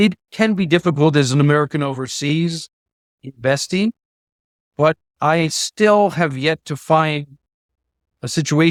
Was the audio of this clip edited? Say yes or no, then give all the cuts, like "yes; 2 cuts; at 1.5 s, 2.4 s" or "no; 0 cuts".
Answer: no; 0 cuts